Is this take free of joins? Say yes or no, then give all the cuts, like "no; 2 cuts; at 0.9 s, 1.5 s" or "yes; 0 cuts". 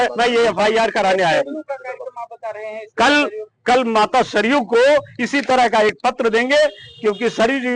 yes; 0 cuts